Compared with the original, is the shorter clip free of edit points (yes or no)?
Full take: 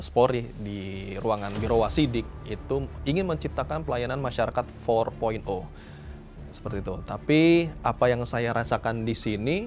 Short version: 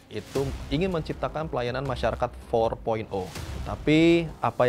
no